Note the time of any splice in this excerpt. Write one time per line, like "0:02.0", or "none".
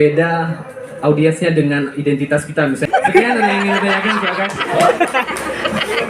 0:02.8